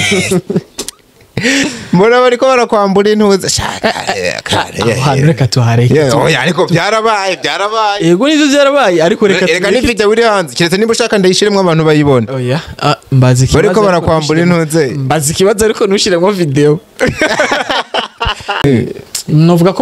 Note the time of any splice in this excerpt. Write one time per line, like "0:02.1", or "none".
0:18.6